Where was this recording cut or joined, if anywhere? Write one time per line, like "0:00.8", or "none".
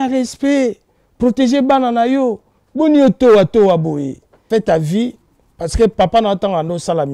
0:04.3